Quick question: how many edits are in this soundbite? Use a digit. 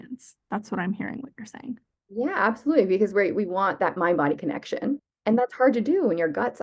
1